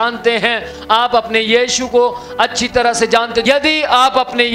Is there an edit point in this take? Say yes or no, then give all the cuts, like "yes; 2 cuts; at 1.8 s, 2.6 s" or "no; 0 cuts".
yes; 1 cut; at 3.4 s